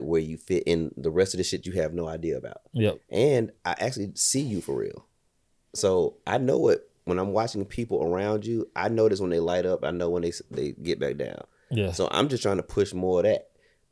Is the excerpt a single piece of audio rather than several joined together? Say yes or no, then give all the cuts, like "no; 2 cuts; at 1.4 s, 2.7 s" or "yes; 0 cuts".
yes; 0 cuts